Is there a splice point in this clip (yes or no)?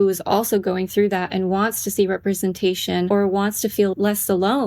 yes